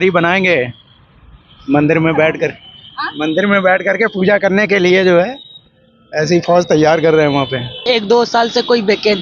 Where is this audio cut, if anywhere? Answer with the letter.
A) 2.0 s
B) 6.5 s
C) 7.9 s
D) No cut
C